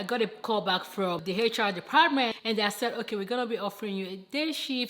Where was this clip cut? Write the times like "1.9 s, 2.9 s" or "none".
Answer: 1.2 s, 2.3 s